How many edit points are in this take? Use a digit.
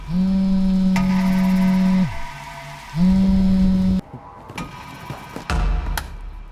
1